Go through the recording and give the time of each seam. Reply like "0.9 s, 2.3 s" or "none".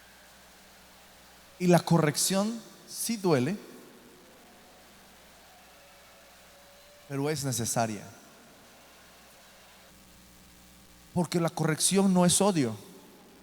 9.9 s